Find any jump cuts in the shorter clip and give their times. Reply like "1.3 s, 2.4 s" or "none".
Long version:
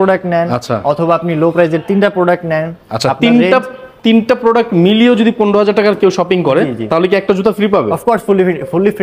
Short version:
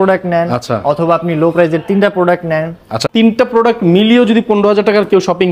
2.9 s